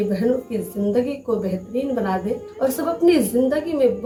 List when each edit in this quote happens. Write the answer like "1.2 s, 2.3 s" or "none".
none